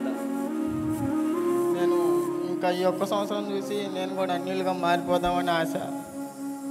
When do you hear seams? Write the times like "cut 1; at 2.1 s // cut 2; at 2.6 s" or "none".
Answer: none